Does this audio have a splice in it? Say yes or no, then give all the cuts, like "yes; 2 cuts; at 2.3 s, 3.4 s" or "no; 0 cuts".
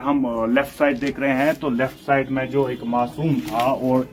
no; 0 cuts